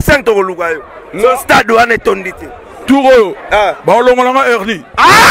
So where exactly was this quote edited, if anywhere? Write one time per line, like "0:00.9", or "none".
none

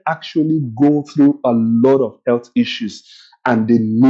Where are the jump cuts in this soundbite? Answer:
none

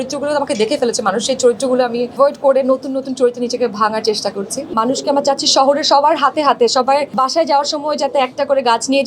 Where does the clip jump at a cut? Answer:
0:02.1
0:04.7
0:07.1

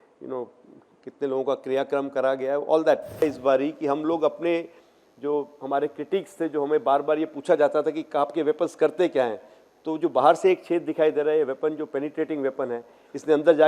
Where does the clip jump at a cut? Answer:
0:03.2

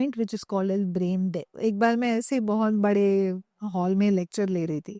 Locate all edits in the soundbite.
0:01.5

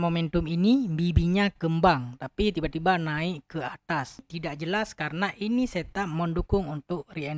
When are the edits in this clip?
0:04.3

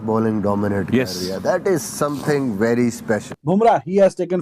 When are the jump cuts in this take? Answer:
0:03.3

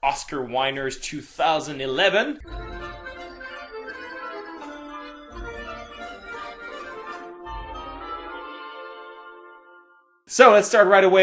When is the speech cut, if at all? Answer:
none

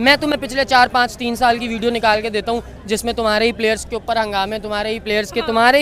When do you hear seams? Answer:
none

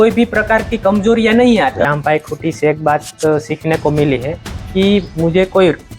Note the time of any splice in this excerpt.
0:01.9

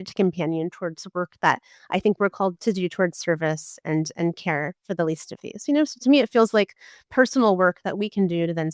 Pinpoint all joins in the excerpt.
0:02.6

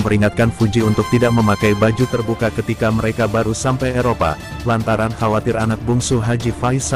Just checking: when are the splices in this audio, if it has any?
none

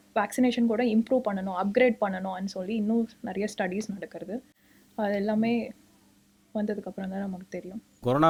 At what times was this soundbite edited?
none

